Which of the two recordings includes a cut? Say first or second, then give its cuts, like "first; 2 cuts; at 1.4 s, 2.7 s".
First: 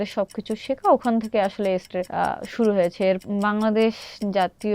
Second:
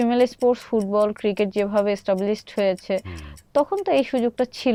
first; 2 cuts; at 2.0 s, 3.2 s